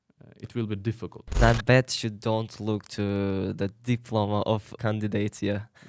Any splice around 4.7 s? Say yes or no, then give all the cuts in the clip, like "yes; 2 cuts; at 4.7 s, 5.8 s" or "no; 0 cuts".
yes; 2 cuts; at 1.4 s, 4.7 s